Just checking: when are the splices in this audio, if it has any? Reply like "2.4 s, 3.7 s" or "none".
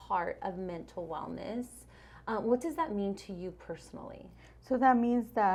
none